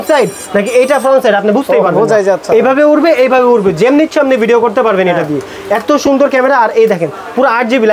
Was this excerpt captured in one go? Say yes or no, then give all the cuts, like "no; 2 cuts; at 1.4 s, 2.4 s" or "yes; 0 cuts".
yes; 0 cuts